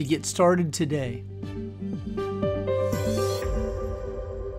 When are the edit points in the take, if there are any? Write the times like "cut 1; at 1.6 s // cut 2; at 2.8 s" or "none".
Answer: cut 1; at 1.2 s

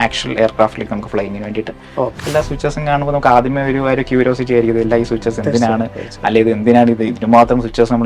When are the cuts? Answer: cut 1; at 2.2 s

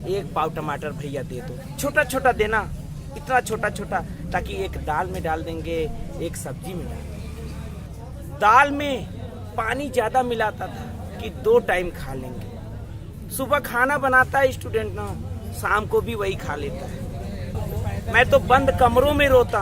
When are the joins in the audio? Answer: cut 1; at 7.9 s // cut 2; at 17.6 s

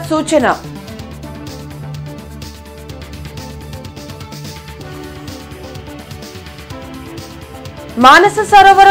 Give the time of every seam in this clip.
none

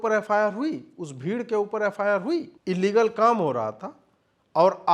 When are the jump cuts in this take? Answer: cut 1; at 2.5 s

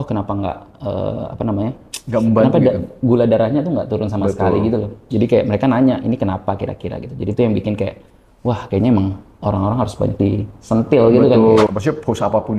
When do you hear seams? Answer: cut 1; at 11.7 s

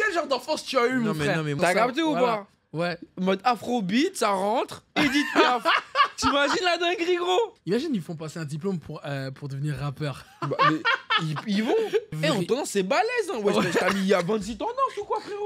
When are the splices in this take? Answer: cut 1; at 1.6 s // cut 2; at 7.6 s // cut 3; at 12.1 s

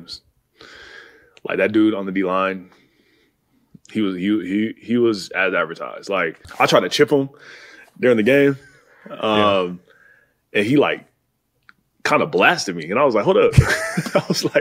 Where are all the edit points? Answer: cut 1; at 6.4 s

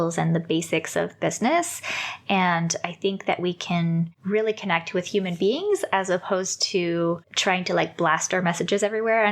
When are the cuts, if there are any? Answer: cut 1; at 4.2 s // cut 2; at 7.3 s

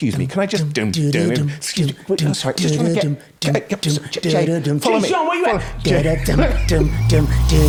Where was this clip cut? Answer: none

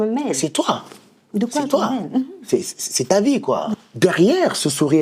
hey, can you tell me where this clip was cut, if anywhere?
cut 1; at 3.7 s

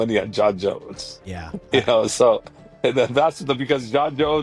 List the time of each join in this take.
none

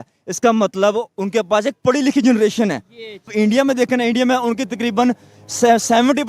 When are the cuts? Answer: cut 1; at 3.3 s

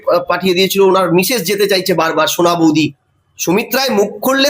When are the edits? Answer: cut 1; at 2.7 s

